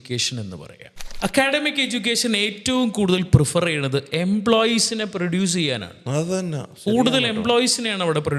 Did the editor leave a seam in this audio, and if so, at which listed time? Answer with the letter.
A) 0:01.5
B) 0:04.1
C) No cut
C